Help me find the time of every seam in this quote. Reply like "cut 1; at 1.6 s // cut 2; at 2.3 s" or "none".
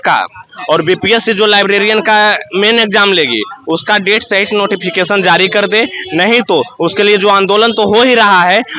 none